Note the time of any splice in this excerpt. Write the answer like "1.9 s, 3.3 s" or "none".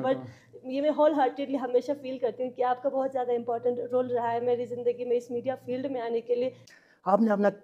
6.6 s